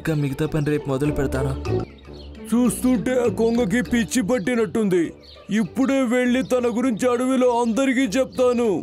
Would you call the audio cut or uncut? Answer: cut